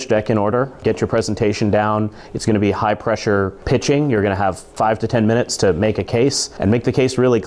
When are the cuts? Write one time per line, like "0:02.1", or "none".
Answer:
0:03.6
0:04.6
0:06.5